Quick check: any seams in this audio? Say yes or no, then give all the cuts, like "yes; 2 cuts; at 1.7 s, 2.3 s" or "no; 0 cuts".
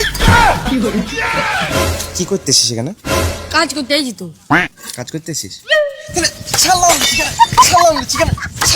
yes; 1 cut; at 1.8 s